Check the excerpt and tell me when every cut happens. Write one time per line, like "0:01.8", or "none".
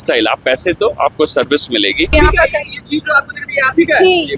0:02.1